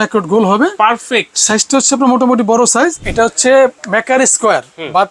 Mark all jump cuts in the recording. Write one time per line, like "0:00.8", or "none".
0:03.1